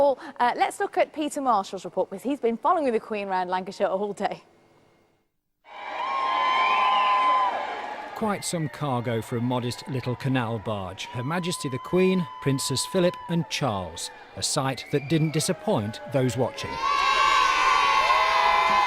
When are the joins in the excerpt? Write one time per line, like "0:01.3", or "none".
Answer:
0:14.5

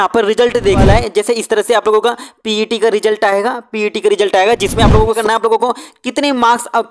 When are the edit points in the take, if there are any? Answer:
0:00.8
0:05.2

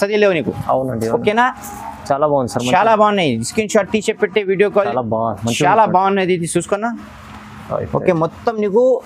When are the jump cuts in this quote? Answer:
0:04.9

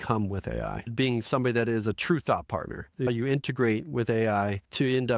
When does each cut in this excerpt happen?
0:00.9
0:03.1

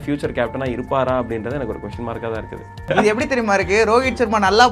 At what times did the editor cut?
0:02.9

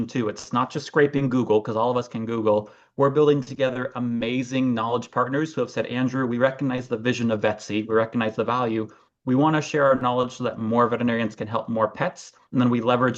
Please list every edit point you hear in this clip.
none

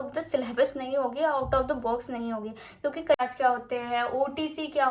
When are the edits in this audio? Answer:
0:03.1

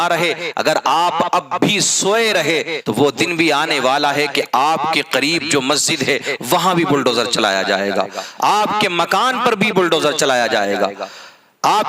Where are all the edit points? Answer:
0:02.8

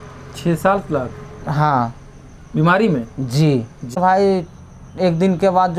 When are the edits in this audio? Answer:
0:04.0

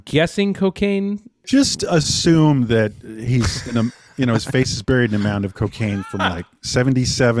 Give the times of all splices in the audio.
0:01.4

